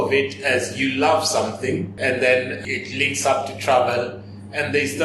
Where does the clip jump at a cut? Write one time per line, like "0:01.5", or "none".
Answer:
0:01.9
0:02.6